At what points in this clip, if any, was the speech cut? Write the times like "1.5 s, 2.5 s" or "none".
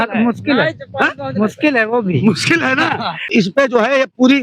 3.3 s